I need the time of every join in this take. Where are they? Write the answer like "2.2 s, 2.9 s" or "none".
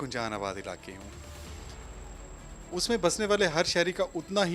none

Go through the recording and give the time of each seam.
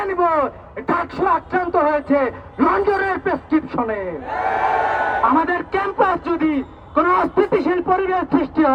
none

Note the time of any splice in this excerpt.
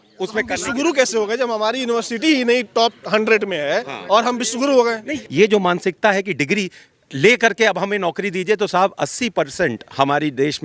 5.1 s

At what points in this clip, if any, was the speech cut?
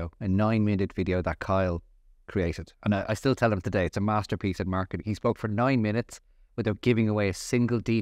none

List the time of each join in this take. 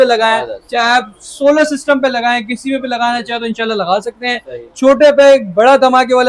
none

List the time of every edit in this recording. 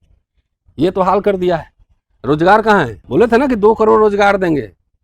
3.0 s

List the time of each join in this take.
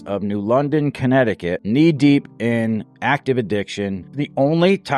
1.5 s, 4.0 s

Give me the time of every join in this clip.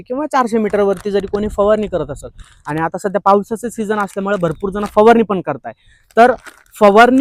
none

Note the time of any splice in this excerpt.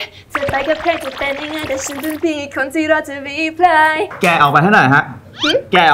4.1 s

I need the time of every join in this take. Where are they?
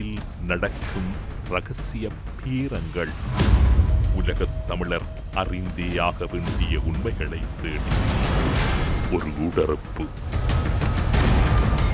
none

